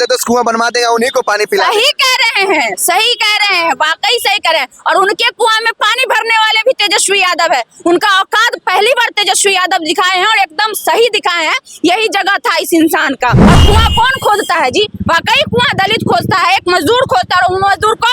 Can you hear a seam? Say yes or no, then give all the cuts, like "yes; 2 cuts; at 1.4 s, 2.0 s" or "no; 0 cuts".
yes; 1 cut; at 13.4 s